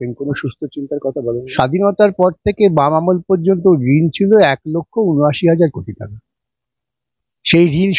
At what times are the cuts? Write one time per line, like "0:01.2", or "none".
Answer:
0:01.5